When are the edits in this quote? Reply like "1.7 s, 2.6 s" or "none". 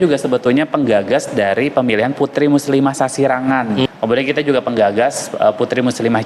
3.9 s